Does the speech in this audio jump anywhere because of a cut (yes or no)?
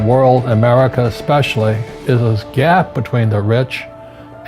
yes